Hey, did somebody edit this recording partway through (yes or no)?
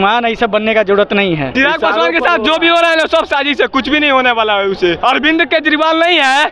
yes